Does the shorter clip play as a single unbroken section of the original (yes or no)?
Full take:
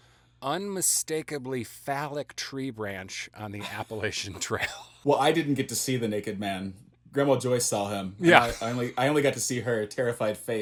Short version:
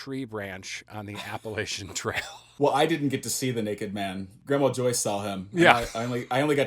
no